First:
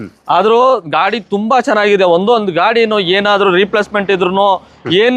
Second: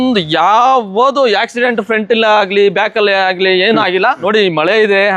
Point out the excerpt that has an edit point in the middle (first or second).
second